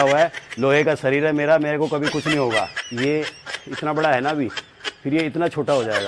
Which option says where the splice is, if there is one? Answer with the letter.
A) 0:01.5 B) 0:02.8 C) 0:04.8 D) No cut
B